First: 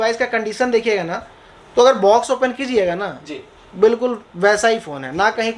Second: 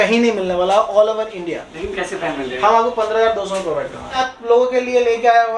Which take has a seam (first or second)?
second